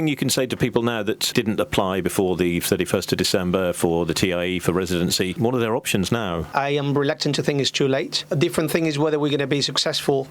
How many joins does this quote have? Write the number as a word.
four